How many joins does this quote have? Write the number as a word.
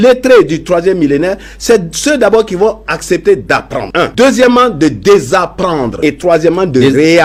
zero